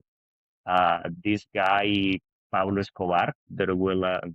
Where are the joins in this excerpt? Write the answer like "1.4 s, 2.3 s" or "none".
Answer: 3.4 s